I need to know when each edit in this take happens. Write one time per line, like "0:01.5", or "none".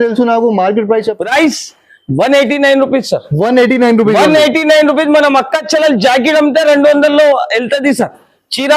0:01.2